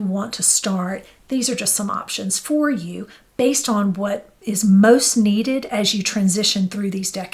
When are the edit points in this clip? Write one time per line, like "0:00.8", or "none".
0:04.3